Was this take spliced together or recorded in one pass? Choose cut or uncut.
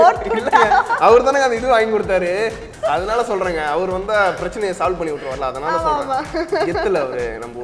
cut